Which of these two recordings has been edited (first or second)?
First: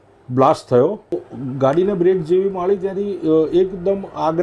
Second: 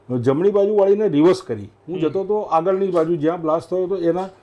first